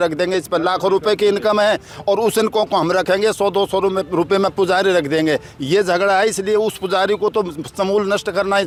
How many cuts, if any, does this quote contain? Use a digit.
0